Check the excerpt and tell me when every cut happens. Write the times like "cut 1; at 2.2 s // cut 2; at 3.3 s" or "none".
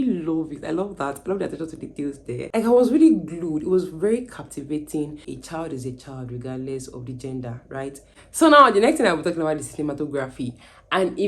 cut 1; at 2.5 s // cut 2; at 5.3 s // cut 3; at 8.2 s